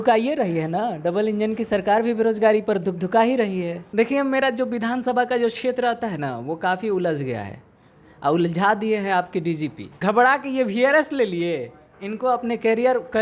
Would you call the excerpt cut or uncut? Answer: cut